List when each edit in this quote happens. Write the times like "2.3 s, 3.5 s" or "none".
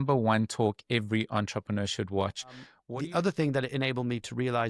2.8 s